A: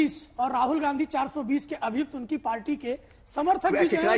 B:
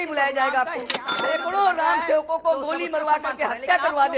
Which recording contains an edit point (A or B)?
B